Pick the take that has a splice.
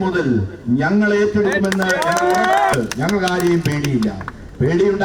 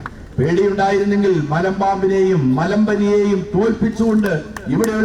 first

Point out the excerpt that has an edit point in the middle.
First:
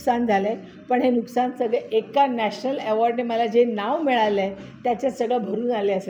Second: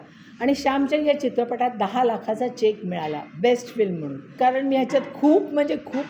second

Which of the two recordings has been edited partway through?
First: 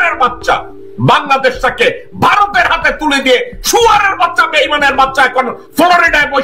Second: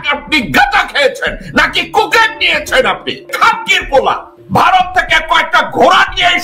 second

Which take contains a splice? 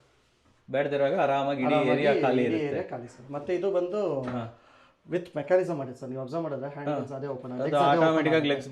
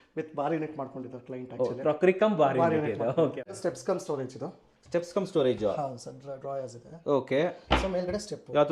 second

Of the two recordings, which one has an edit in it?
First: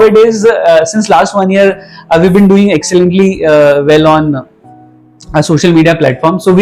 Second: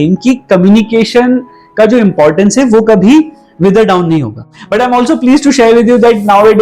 second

